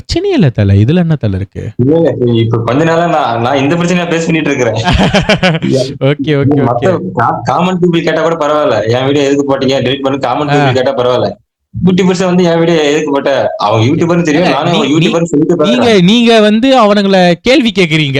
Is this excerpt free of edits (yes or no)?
yes